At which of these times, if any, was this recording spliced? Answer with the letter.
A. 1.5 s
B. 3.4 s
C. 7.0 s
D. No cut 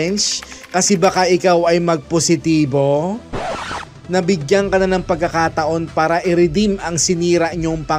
B